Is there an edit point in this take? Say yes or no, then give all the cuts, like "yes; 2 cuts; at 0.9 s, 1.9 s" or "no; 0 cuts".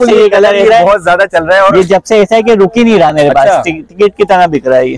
no; 0 cuts